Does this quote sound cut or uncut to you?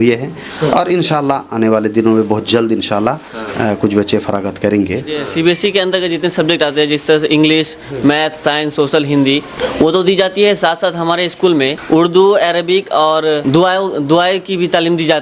cut